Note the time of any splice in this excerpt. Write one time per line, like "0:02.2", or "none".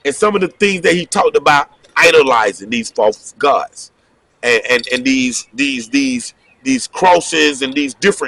none